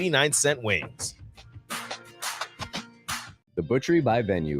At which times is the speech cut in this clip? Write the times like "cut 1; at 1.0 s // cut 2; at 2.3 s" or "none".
cut 1; at 3.4 s